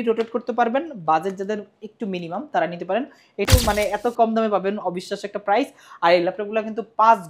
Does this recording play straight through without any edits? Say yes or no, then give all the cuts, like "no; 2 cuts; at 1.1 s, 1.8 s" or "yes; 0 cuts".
no; 1 cut; at 3.5 s